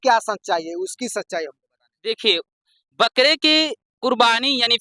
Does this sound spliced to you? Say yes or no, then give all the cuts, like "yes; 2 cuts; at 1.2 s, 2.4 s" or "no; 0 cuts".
no; 0 cuts